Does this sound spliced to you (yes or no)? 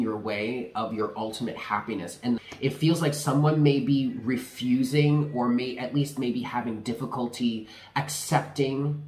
yes